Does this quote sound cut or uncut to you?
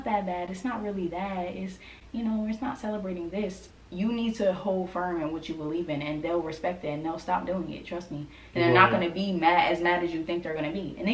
uncut